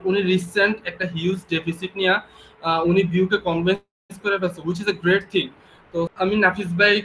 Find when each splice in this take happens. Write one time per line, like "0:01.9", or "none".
0:06.1